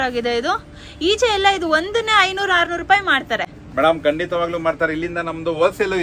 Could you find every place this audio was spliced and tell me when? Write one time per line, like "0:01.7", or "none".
none